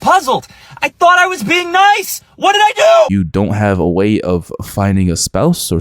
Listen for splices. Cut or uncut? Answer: cut